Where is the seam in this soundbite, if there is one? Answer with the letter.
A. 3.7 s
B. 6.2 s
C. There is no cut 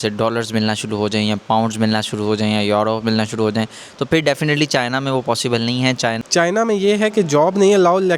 B